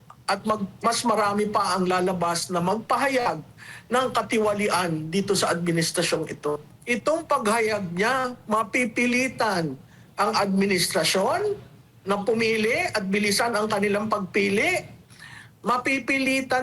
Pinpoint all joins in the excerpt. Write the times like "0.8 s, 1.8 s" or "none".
6.7 s